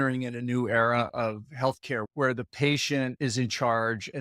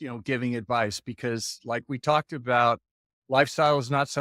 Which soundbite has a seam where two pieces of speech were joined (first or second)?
first